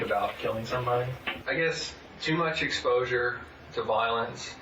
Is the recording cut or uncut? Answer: cut